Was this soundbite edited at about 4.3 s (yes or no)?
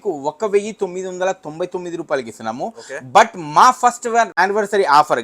yes